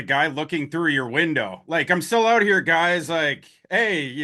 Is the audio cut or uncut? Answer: uncut